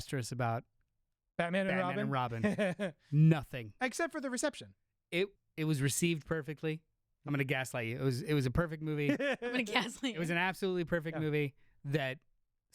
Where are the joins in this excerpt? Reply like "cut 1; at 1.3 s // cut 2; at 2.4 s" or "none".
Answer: cut 1; at 5.4 s